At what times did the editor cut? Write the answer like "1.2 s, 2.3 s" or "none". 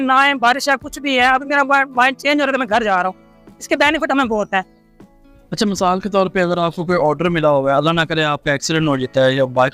none